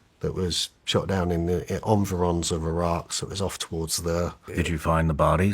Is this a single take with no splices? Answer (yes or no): no